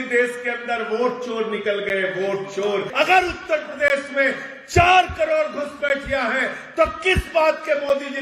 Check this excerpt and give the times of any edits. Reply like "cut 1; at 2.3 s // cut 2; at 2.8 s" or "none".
cut 1; at 2.9 s